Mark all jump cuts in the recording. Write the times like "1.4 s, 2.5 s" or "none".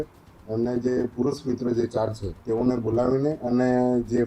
2.3 s